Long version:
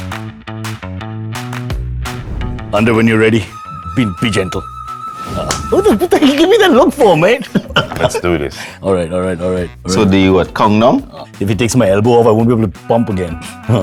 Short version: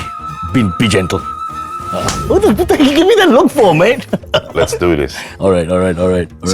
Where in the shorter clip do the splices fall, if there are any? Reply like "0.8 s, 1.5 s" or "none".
none